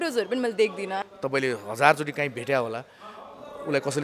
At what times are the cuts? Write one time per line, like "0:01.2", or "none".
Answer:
0:01.0